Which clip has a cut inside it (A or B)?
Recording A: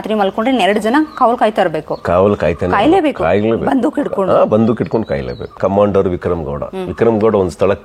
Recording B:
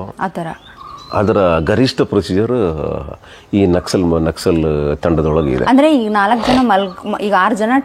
A